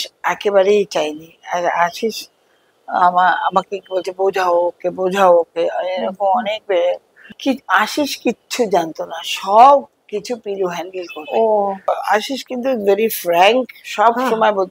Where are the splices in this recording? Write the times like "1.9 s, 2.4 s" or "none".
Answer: 7.3 s, 11.9 s